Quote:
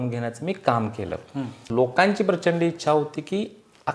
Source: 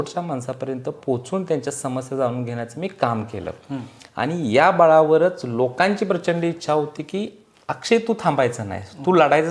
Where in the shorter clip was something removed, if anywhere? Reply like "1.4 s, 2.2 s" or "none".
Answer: 1.6 s